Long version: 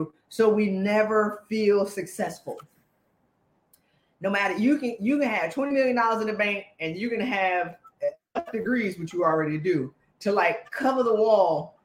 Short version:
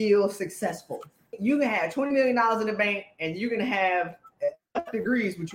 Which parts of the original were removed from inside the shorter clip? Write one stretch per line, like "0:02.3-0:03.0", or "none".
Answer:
0:02.9-0:05.0